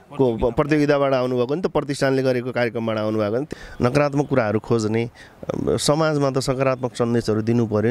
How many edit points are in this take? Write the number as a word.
one